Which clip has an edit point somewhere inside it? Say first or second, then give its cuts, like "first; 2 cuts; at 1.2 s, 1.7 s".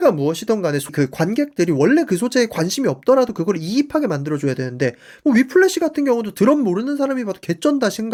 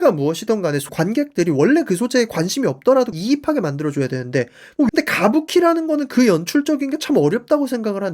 second; 3 cuts; at 0.9 s, 3.1 s, 4.9 s